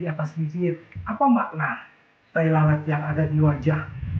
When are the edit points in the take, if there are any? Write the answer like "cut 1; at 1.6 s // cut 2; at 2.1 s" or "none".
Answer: cut 1; at 0.9 s